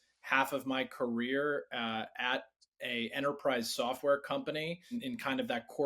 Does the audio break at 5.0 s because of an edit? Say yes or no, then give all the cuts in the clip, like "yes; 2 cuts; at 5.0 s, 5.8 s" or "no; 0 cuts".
yes; 1 cut; at 5.0 s